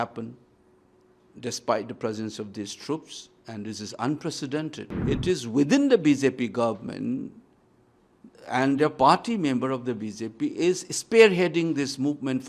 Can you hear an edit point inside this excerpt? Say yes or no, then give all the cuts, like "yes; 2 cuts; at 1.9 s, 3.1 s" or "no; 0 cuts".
yes; 1 cut; at 4.9 s